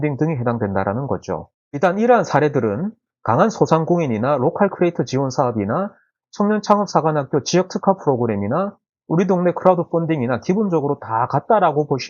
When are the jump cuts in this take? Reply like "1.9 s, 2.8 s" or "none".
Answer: 1.4 s